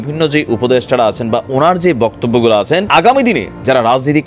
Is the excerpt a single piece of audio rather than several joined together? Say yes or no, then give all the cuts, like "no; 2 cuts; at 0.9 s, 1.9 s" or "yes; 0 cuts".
no; 1 cut; at 2.9 s